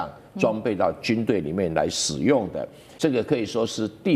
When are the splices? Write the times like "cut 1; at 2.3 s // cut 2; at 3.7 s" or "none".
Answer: cut 1; at 2.8 s